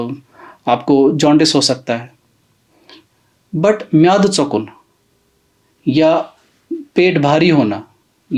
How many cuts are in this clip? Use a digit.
0